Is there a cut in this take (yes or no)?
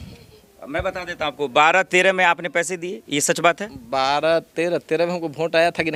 no